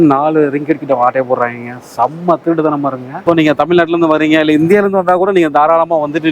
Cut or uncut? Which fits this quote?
cut